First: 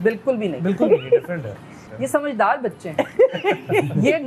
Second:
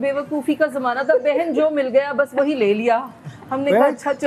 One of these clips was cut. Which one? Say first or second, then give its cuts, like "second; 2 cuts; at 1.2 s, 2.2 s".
first; 1 cut; at 1.8 s